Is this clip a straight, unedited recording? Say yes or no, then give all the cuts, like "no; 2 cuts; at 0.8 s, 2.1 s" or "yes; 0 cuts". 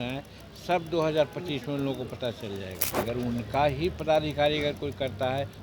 no; 1 cut; at 2.8 s